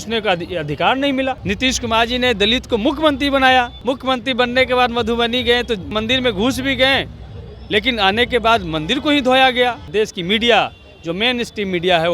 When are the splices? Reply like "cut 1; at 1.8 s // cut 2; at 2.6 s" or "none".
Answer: cut 1; at 1.4 s // cut 2; at 3.8 s // cut 3; at 5.9 s // cut 4; at 9.9 s